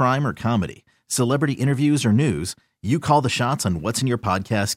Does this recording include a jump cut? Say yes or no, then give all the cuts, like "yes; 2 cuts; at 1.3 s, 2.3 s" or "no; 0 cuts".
no; 0 cuts